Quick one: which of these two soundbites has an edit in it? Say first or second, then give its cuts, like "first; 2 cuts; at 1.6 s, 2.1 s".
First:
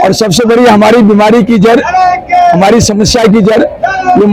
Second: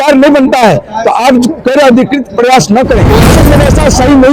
second; 1 cut; at 3.4 s